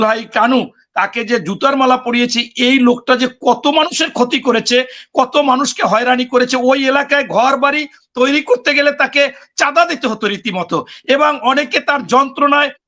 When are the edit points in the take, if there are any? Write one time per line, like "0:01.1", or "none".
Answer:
none